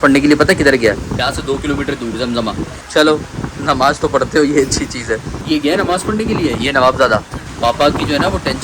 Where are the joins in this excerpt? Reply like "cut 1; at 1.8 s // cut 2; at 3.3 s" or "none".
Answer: cut 1; at 1.1 s // cut 2; at 2.7 s // cut 3; at 5.4 s // cut 4; at 7.4 s